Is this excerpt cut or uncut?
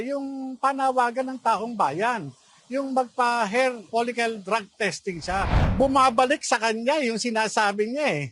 cut